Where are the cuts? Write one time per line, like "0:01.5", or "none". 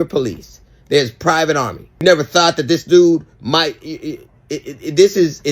0:01.8